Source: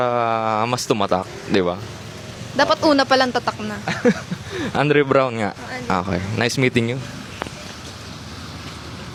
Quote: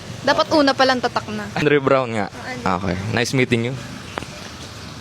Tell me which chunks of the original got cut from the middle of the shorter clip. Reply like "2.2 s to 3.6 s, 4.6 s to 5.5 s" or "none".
3.9 s to 4.9 s